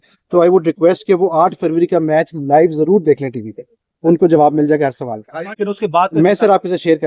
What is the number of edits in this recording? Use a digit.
1